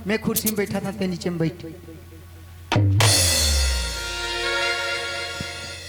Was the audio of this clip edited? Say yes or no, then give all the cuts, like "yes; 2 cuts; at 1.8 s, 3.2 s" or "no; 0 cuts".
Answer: no; 0 cuts